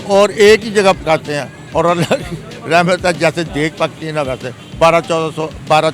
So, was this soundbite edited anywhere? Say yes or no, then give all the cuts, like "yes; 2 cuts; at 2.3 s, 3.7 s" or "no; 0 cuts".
no; 0 cuts